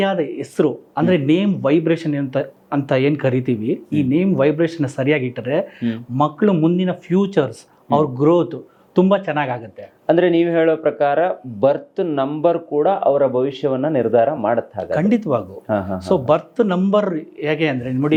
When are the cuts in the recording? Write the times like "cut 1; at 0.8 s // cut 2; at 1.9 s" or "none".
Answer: none

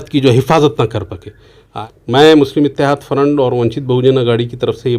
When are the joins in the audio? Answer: cut 1; at 1.7 s

